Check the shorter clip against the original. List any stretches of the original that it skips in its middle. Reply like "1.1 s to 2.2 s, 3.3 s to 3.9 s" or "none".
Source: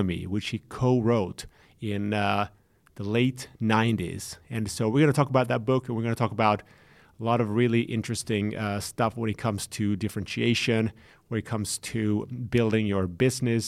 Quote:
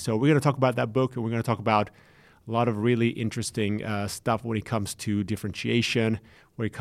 none